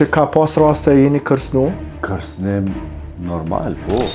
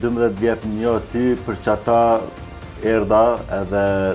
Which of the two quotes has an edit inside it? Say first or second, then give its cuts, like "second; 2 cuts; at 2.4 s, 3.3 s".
first; 1 cut; at 1.9 s